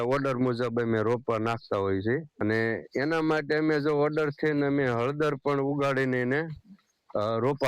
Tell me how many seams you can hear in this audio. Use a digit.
1